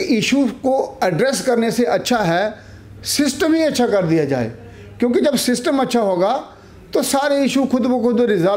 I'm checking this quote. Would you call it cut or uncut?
uncut